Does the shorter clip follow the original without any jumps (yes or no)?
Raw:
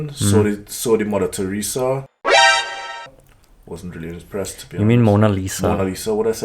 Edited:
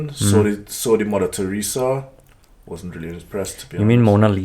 no